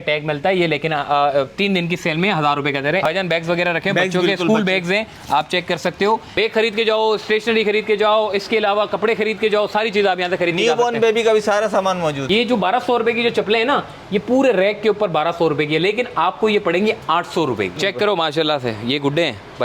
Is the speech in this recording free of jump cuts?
no; 4 cuts; at 3.1 s, 6.3 s, 12.2 s, 17.8 s

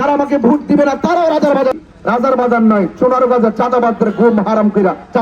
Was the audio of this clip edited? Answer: yes; 1 cut; at 1.7 s

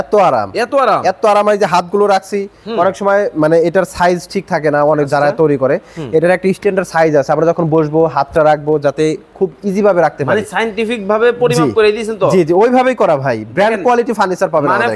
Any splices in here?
no; 0 cuts

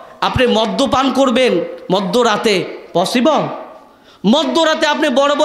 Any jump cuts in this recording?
no; 0 cuts

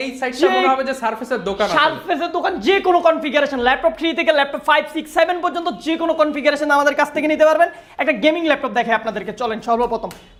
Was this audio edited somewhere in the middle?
no; 0 cuts

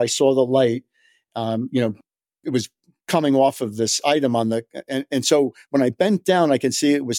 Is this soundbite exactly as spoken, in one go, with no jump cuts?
no; 1 cut; at 2.0 s

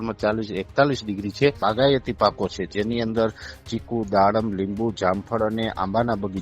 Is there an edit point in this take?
yes; 1 cut; at 1.6 s

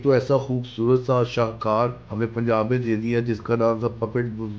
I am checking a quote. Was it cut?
yes; 1 cut; at 2.0 s

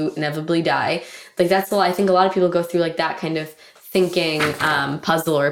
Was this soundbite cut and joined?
no; 0 cuts

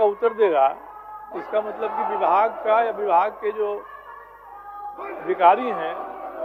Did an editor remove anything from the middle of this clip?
no; 0 cuts

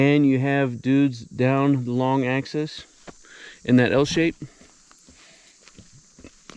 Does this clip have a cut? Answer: no; 0 cuts

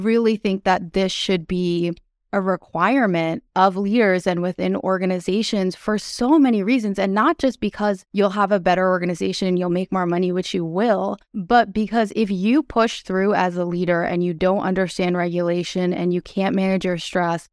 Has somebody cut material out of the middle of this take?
no; 0 cuts

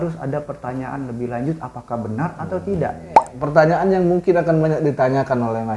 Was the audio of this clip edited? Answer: yes; 1 cut; at 3.3 s

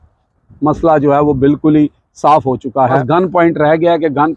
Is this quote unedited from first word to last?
no; 1 cut; at 3.0 s

